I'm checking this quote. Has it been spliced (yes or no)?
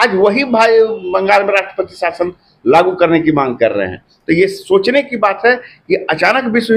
no